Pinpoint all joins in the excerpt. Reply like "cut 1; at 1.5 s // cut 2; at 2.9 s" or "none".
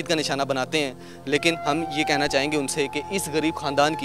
none